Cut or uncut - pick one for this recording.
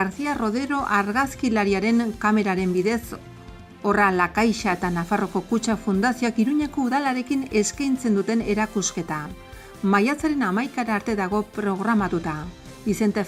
uncut